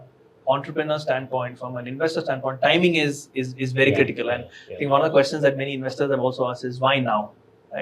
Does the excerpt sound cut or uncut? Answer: uncut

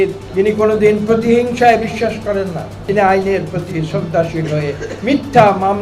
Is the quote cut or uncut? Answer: cut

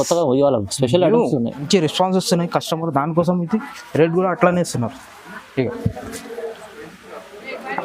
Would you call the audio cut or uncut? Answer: cut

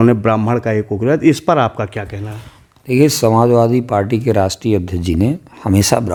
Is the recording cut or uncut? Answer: uncut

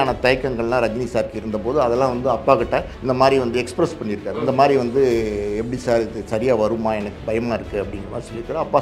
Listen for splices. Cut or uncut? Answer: cut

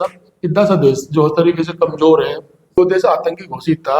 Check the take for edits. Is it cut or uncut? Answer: cut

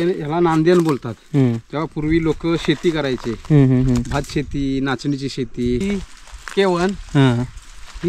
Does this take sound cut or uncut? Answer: cut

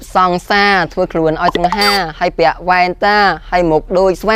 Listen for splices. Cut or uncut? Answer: uncut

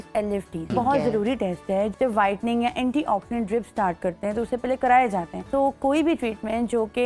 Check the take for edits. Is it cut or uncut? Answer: cut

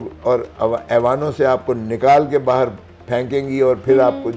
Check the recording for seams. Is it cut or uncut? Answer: uncut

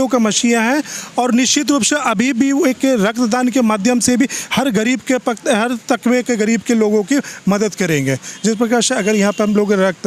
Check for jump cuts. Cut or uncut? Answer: uncut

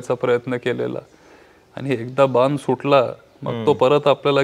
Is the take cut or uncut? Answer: uncut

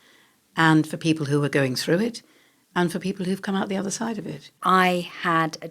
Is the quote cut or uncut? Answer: cut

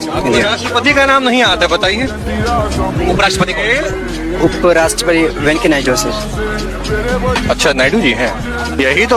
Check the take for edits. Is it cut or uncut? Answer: uncut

